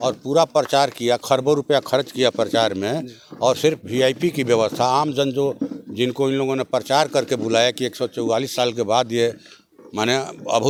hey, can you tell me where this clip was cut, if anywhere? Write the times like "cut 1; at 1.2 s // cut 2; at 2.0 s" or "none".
none